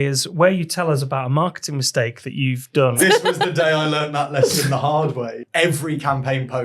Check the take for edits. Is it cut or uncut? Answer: cut